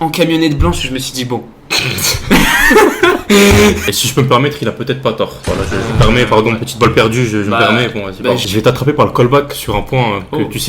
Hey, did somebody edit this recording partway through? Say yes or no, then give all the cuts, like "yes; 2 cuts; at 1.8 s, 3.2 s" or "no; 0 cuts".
yes; 2 cuts; at 3.8 s, 8.4 s